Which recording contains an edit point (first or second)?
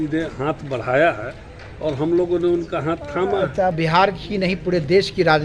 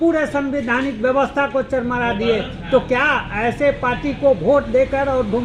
first